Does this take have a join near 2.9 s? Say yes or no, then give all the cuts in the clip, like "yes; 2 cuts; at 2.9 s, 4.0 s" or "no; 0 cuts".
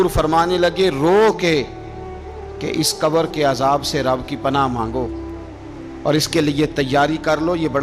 no; 0 cuts